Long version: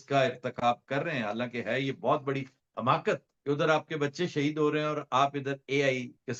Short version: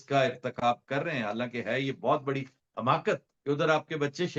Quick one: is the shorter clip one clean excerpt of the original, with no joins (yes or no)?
yes